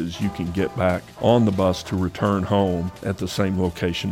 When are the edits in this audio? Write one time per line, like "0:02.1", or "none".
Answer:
0:01.1
0:03.0